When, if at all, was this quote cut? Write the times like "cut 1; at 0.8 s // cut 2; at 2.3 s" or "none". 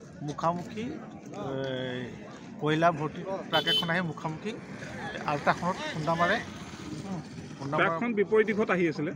none